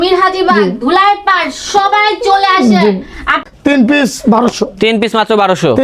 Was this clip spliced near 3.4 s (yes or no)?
yes